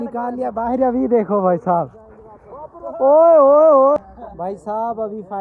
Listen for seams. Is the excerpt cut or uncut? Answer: cut